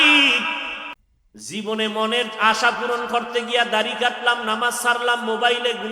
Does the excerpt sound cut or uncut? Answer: cut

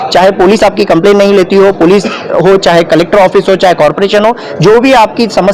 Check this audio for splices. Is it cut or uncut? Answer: uncut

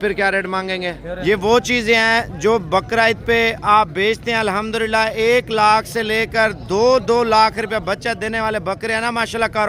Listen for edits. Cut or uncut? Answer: cut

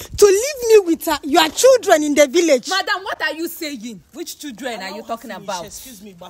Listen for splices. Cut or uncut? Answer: uncut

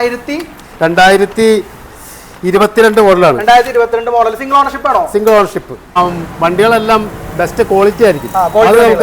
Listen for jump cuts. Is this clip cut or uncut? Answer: cut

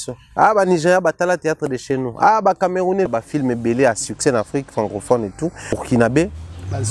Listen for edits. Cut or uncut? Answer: cut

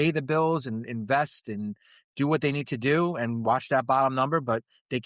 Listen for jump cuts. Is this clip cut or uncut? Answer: uncut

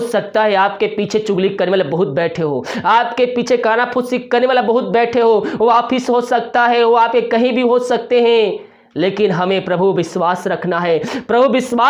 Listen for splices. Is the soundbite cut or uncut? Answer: uncut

